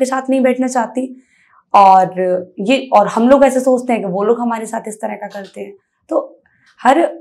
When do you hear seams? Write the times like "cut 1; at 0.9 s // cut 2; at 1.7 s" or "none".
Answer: none